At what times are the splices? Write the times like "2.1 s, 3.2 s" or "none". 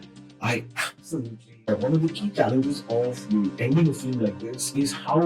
1.7 s

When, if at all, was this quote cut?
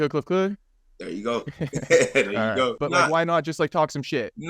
2.8 s

